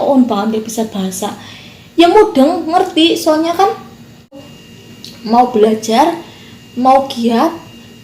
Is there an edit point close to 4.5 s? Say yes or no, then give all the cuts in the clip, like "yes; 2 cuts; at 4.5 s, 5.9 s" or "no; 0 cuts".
yes; 1 cut; at 4.5 s